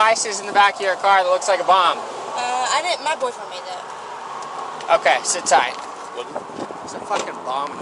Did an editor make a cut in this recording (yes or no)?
no